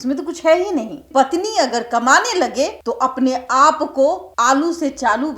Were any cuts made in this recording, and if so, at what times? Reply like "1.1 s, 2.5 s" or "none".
1.1 s, 2.8 s, 4.3 s